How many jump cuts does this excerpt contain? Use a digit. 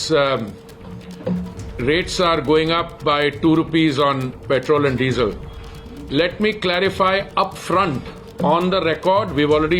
0